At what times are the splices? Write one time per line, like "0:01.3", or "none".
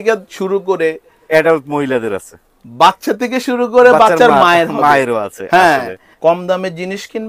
0:06.0